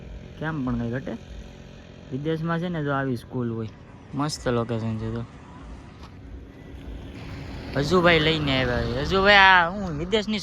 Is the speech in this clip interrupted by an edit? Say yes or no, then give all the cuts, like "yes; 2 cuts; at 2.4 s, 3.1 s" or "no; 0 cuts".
no; 0 cuts